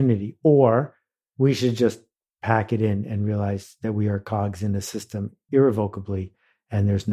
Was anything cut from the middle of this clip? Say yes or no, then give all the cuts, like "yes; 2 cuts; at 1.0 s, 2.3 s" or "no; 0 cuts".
yes; 1 cut; at 5.4 s